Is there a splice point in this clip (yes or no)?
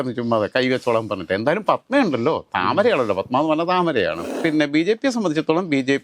yes